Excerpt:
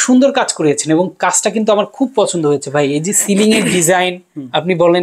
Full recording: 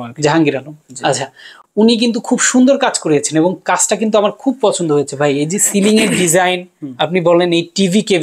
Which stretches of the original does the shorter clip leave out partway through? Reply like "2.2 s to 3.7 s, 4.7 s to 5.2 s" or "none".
none